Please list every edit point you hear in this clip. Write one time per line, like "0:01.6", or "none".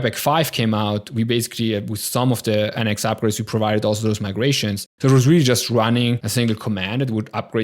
0:04.9
0:06.2

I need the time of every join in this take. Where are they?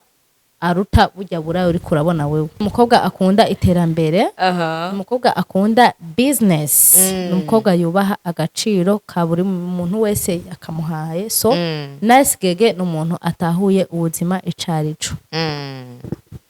0:02.6

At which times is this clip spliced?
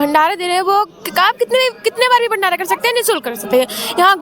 none

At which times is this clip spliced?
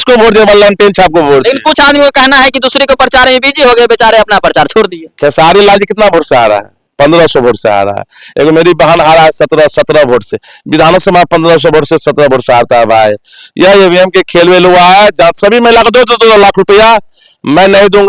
none

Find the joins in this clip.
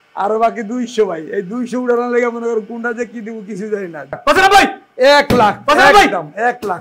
0:04.2

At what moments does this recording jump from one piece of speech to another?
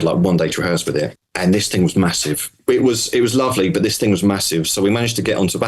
0:01.2
0:02.6

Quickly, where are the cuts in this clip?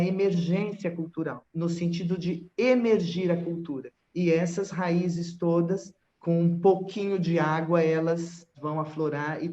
0:08.5

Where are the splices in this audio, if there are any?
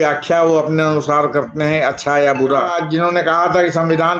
0:02.8

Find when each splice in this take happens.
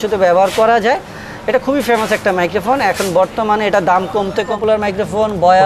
0:04.6

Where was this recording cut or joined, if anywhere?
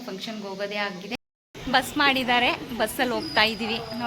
0:01.1

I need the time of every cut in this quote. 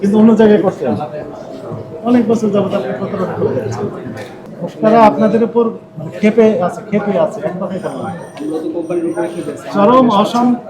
0:04.4

